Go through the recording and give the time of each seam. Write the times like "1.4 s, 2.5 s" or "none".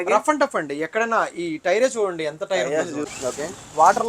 3.1 s